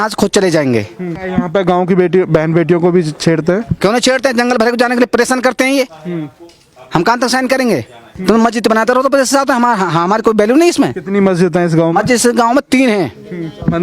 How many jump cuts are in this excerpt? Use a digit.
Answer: 2